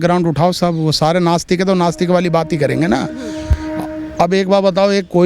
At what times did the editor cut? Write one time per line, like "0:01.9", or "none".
none